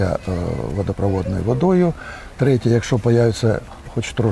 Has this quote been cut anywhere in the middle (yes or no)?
no